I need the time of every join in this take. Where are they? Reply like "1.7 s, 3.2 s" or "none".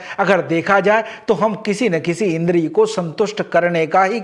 none